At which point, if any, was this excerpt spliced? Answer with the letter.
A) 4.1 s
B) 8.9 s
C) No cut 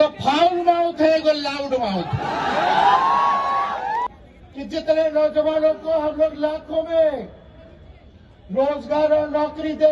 A